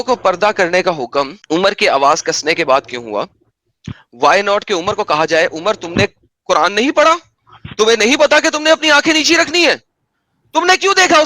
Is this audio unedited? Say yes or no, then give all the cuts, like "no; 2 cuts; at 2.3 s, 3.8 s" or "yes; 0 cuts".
yes; 0 cuts